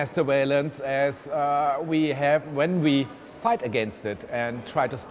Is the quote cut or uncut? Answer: uncut